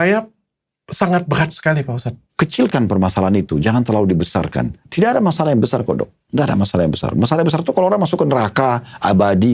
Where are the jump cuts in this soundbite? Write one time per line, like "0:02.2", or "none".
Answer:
0:02.2
0:04.8